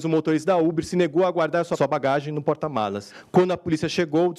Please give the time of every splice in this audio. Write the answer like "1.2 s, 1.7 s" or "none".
1.7 s, 3.1 s